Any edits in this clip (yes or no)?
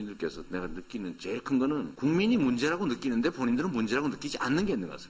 no